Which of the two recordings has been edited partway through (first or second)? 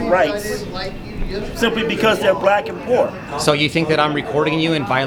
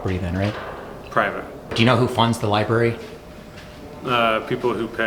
second